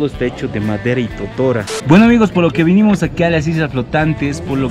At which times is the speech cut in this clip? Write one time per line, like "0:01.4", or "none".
none